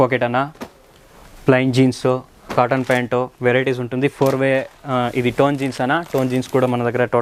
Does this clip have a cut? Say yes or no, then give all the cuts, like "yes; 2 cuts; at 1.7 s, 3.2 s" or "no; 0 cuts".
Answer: no; 0 cuts